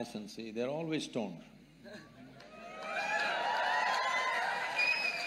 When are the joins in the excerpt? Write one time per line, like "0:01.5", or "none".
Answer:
none